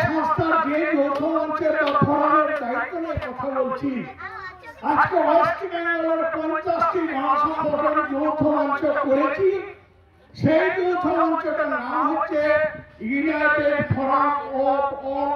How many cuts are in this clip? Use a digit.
0